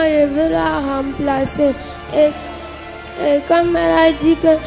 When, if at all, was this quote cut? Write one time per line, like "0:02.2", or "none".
none

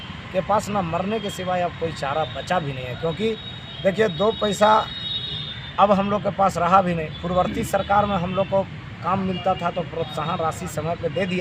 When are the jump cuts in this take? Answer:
none

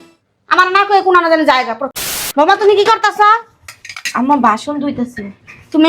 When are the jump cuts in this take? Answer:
0:01.8

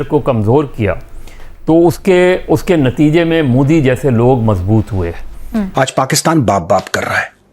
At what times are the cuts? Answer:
0:05.7

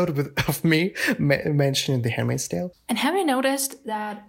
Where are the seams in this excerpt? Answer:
0:02.8

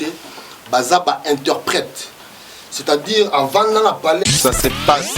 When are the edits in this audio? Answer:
0:04.2

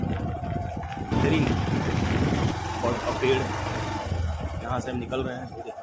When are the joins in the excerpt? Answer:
0:01.1
0:02.5

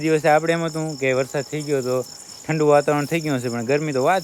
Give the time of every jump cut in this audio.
none

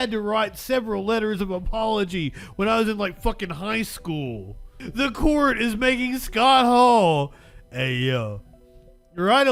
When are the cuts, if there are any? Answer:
0:04.8

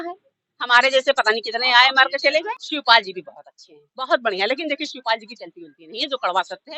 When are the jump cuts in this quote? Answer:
0:02.6

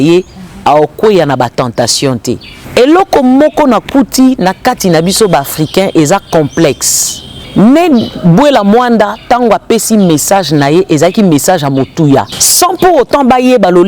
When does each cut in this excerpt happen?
0:02.5
0:07.4
0:12.4

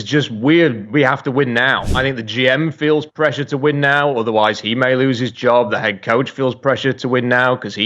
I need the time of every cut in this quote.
0:01.9

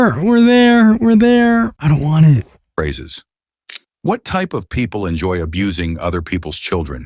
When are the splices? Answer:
0:01.8

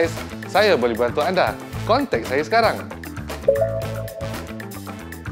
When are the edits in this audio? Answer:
0:04.2

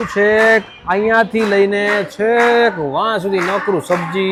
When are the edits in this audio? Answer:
none

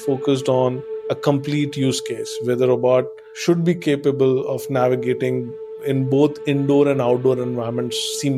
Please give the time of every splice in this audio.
none

